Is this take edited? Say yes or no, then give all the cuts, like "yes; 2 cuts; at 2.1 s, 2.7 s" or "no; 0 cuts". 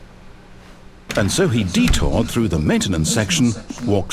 yes; 1 cut; at 1.2 s